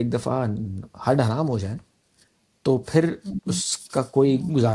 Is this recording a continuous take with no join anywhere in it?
yes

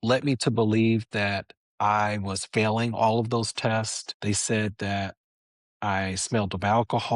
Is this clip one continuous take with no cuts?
no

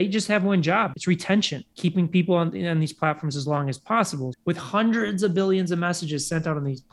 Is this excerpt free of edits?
no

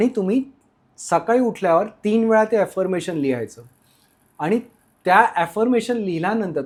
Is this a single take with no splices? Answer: yes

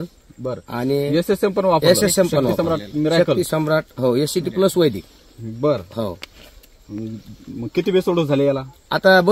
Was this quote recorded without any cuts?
yes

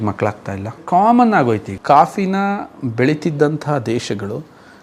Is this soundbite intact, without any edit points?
no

